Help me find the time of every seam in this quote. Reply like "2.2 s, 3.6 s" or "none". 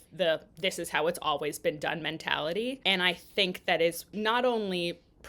2.8 s, 4.1 s